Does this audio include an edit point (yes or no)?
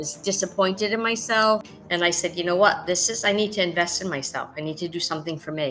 yes